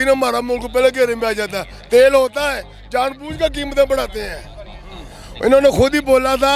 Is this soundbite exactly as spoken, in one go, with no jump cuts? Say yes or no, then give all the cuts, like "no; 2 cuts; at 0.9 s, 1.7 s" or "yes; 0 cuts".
yes; 0 cuts